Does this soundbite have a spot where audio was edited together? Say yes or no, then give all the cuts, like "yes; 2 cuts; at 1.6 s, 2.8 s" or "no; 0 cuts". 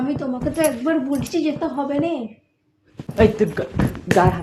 yes; 1 cut; at 2.4 s